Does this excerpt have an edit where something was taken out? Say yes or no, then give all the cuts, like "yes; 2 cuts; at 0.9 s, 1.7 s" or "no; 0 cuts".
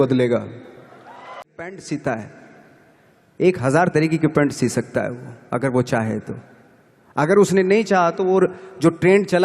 yes; 1 cut; at 1.6 s